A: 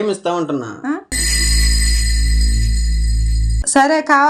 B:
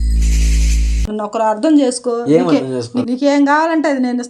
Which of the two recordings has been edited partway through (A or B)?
B